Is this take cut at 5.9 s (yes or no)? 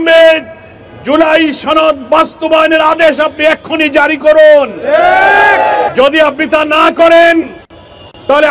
yes